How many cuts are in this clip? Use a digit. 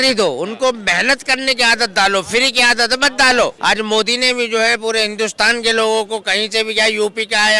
1